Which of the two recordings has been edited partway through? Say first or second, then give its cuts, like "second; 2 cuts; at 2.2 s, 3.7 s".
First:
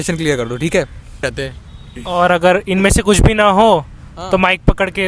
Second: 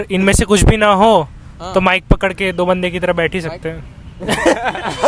first; 1 cut; at 1.3 s